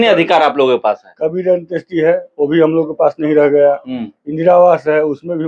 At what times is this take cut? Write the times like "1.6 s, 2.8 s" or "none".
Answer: none